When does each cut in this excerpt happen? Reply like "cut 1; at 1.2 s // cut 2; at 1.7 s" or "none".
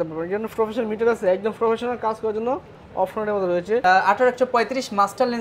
cut 1; at 3.8 s